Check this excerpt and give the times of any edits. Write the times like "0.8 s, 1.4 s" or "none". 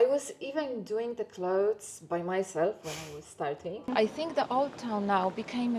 3.9 s